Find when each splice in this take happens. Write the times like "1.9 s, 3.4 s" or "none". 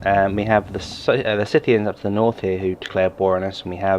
none